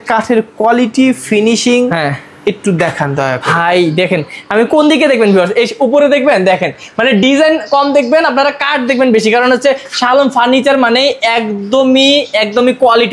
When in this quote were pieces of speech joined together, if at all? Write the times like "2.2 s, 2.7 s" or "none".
none